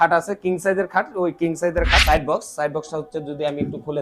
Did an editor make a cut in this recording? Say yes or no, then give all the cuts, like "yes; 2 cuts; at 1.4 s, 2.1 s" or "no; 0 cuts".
yes; 1 cut; at 2.0 s